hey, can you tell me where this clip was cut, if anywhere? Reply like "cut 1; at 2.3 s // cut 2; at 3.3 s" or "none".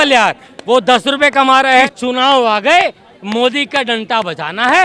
cut 1; at 1.9 s